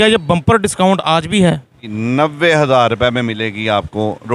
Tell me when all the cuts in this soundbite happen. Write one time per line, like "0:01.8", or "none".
0:01.8